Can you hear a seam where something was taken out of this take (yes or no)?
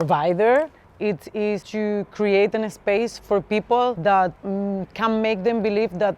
yes